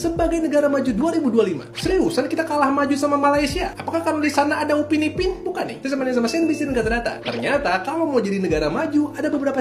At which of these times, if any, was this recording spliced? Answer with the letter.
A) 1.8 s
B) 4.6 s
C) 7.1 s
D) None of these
D